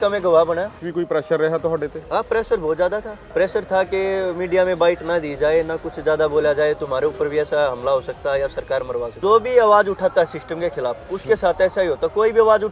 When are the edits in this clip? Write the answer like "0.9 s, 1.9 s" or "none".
0.8 s, 3.2 s, 9.1 s

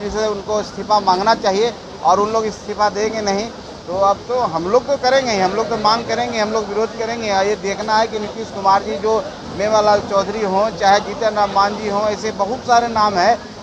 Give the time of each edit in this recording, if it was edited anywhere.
none

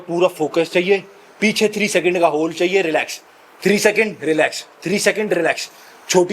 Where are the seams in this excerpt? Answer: none

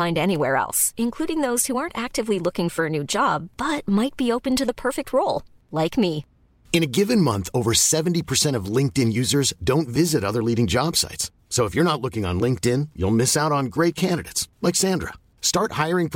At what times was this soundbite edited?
none

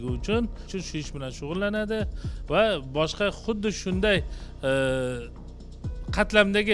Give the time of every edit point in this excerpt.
none

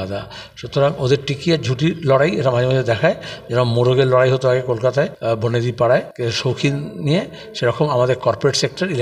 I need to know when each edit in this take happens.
5.2 s, 6.1 s

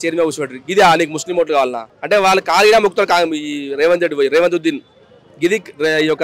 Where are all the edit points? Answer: none

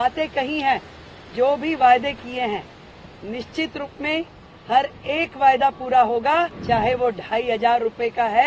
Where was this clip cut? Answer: 6.6 s

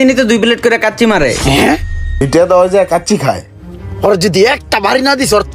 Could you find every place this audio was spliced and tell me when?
2.0 s

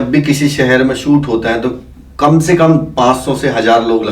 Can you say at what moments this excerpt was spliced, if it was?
none

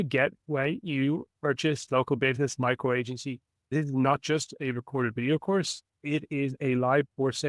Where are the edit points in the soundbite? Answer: 1.8 s, 3.7 s, 6.6 s

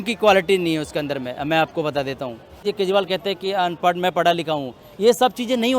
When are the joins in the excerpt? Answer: 2.6 s

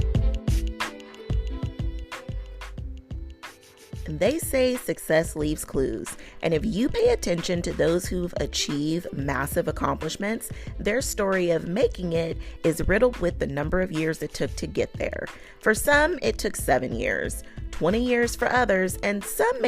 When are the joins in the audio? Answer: 4.0 s

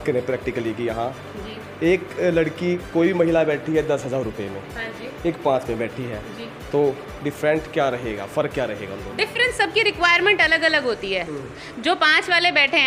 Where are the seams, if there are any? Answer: none

